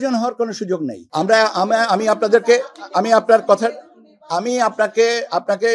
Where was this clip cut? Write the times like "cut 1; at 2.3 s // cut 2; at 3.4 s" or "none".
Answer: cut 1; at 1.0 s